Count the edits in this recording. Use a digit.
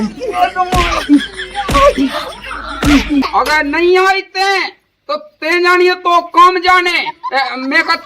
1